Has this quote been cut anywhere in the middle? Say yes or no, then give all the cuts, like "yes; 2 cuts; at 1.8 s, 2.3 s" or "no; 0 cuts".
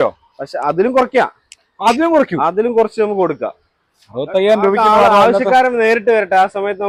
no; 0 cuts